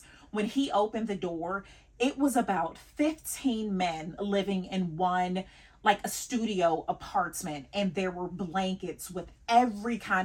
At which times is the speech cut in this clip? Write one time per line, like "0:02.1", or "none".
none